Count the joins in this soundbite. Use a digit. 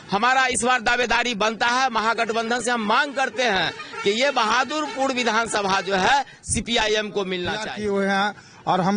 1